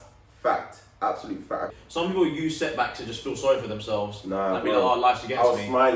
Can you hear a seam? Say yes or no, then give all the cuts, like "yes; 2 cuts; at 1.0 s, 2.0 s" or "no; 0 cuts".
yes; 1 cut; at 1.8 s